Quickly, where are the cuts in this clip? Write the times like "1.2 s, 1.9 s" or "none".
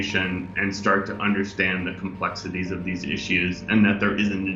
none